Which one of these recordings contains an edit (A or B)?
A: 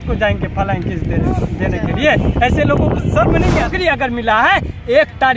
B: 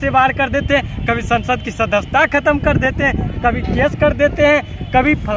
A